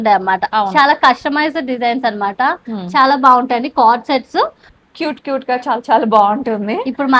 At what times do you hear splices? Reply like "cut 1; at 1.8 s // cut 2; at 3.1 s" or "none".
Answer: cut 1; at 4.7 s